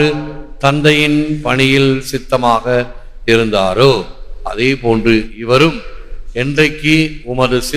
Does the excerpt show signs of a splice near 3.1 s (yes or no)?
no